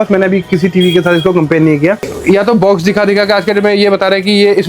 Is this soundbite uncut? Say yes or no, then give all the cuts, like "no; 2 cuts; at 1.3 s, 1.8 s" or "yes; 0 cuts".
no; 1 cut; at 2.1 s